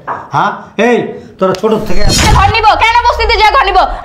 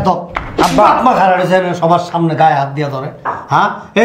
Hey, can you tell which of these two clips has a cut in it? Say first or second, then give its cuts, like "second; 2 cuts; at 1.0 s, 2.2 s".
first; 1 cut; at 2.3 s